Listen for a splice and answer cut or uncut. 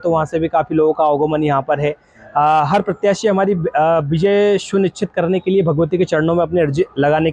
uncut